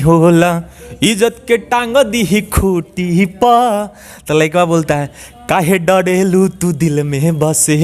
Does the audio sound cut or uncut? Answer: uncut